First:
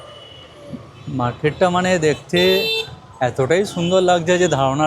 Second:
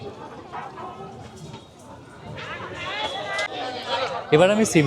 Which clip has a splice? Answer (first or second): second